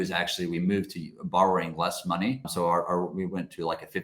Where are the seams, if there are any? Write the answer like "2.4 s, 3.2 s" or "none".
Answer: 2.5 s